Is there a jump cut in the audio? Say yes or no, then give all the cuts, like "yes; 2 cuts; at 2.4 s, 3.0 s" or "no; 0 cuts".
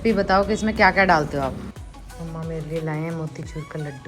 yes; 1 cut; at 1.8 s